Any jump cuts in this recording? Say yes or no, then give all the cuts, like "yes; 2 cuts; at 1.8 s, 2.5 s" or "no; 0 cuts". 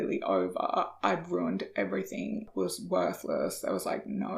yes; 1 cut; at 2.5 s